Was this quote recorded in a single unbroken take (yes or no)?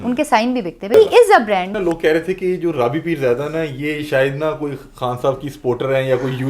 no